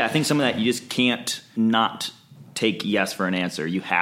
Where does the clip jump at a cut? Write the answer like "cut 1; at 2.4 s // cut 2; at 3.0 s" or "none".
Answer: cut 1; at 1.4 s